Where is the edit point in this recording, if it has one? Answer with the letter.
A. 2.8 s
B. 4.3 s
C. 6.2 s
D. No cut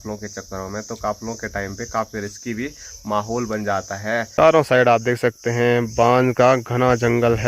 B